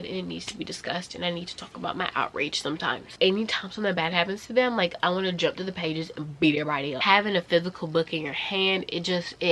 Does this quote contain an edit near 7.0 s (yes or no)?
yes